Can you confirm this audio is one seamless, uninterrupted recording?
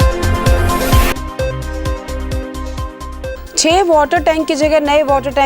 yes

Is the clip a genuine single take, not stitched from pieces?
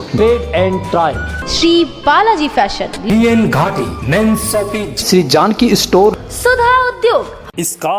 yes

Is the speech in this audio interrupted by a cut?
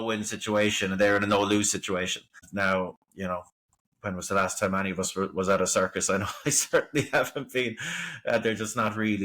yes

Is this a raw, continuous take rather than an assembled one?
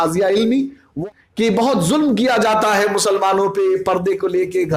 no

